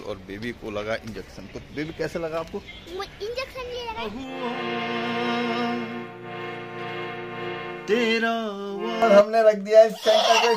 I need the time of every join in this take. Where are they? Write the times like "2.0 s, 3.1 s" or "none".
4.1 s, 9.0 s